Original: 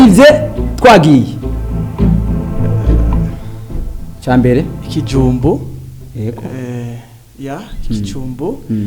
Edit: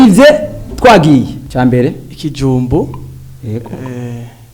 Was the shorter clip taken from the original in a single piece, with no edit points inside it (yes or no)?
no